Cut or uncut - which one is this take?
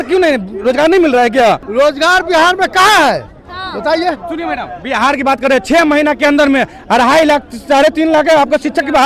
cut